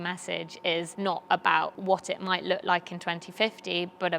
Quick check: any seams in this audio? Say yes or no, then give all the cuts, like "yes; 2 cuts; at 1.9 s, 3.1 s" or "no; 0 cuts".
yes; 2 cuts; at 0.9 s, 1.8 s